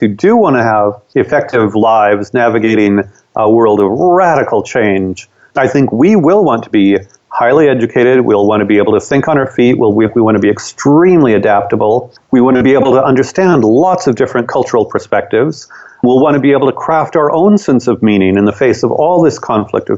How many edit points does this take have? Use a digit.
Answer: 3